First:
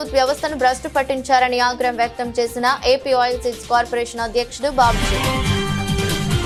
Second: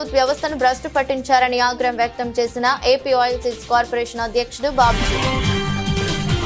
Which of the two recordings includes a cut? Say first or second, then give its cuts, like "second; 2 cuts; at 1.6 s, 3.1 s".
second; 1 cut; at 5.4 s